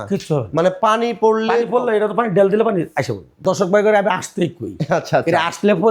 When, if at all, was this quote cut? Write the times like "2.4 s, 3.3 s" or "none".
3.3 s